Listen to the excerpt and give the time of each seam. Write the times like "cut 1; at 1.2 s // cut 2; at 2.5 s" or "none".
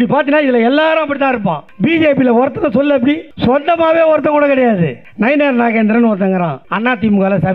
cut 1; at 1.7 s // cut 2; at 3.3 s // cut 3; at 5.0 s // cut 4; at 6.6 s

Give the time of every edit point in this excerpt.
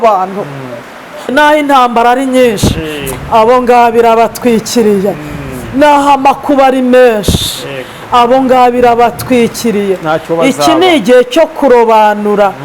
cut 1; at 1.3 s

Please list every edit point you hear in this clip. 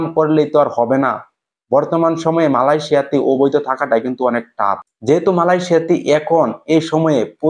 cut 1; at 4.9 s

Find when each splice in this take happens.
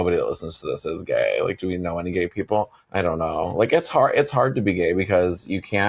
none

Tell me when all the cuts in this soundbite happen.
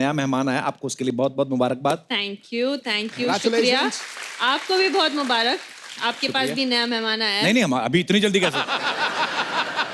none

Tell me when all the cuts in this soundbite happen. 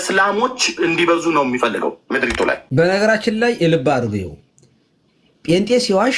cut 1; at 2.0 s

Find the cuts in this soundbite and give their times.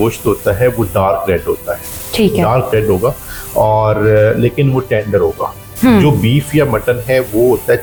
none

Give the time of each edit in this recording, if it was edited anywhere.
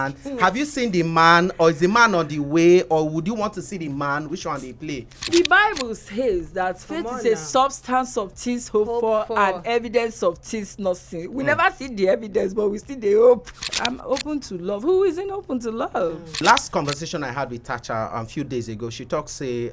cut 1; at 5.3 s // cut 2; at 13.5 s // cut 3; at 16.4 s

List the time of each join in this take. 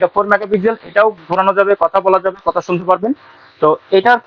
none

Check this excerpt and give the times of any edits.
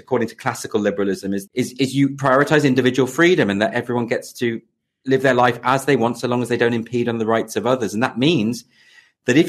cut 1; at 1.4 s

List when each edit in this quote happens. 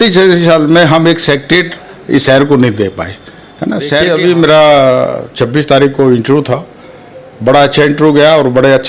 cut 1; at 4.0 s

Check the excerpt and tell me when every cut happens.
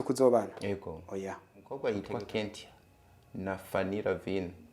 cut 1; at 1.7 s

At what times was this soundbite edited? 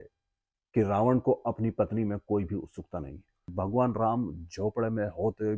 cut 1; at 3.5 s

